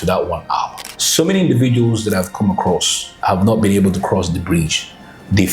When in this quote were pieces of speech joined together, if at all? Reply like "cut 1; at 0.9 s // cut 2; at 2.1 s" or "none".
cut 1; at 1.0 s

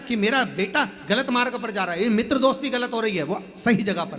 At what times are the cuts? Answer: cut 1; at 1.6 s

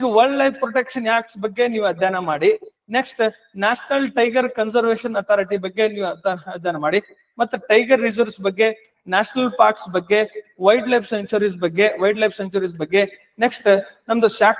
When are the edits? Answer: none

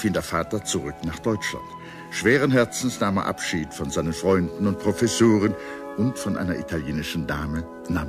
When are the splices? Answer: cut 1; at 4.8 s

